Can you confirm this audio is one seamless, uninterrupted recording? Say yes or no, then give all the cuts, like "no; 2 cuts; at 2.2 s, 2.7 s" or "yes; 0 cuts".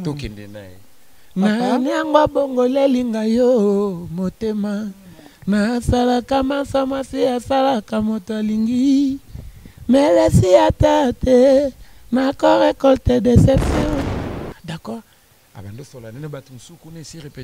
no; 1 cut; at 14.2 s